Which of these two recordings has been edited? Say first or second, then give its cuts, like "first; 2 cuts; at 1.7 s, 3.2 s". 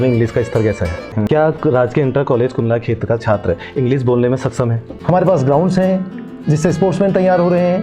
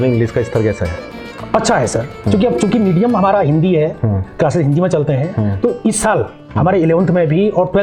first; 2 cuts; at 1.1 s, 4.9 s